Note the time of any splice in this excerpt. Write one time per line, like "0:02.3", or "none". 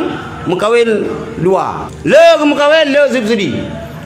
0:01.8